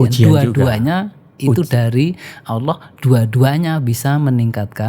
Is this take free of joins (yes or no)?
yes